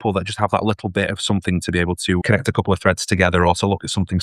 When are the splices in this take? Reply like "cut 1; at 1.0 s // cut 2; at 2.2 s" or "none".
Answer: cut 1; at 2.2 s